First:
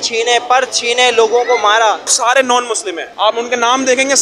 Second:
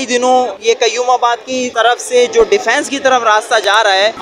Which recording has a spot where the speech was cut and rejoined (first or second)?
first